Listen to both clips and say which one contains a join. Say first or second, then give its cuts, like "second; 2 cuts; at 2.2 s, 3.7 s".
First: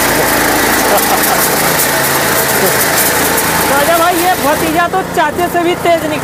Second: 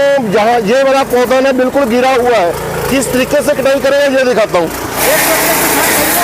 second; 1 cut; at 5.0 s